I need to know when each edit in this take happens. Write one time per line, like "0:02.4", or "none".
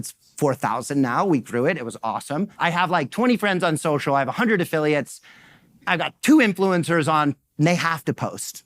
0:02.5